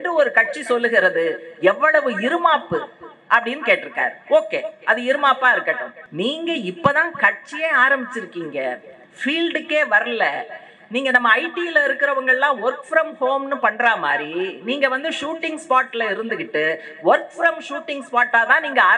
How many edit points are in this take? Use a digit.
1